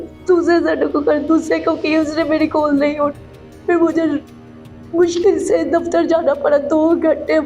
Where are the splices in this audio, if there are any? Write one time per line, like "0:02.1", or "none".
none